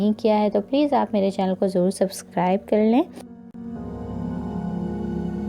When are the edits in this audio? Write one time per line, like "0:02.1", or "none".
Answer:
0:03.2